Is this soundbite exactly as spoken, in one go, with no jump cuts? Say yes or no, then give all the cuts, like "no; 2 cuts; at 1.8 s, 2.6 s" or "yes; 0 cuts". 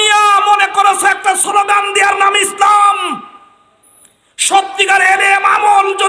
yes; 0 cuts